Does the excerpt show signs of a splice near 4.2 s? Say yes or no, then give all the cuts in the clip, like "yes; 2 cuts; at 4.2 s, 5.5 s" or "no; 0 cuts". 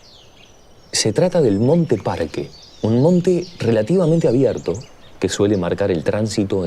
yes; 1 cut; at 4.2 s